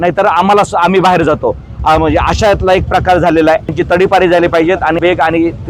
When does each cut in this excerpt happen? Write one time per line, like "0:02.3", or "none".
0:03.7
0:05.0